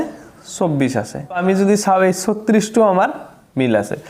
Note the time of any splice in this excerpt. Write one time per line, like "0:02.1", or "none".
0:01.2